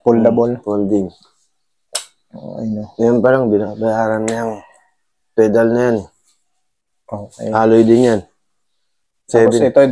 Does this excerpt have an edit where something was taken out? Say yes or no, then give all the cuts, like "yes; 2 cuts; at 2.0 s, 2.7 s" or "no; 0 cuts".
no; 0 cuts